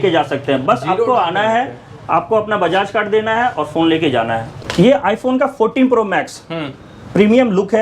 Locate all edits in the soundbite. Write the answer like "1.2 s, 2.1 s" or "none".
4.5 s